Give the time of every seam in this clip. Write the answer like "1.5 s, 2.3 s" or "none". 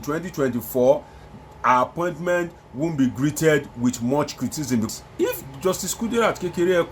4.9 s